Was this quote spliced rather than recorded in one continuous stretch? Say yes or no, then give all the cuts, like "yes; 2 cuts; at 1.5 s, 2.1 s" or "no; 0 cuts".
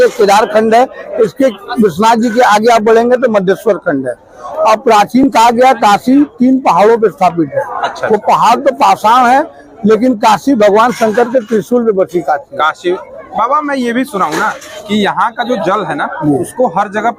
no; 0 cuts